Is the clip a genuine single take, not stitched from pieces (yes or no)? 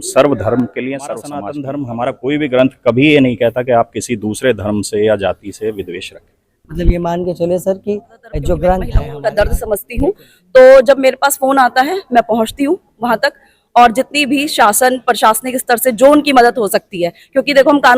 no